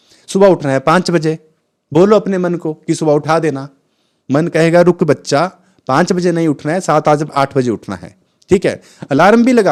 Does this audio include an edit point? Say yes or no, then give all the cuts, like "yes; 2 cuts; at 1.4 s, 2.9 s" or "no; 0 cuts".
no; 0 cuts